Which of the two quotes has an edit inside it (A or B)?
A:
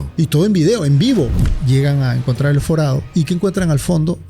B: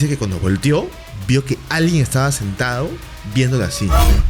A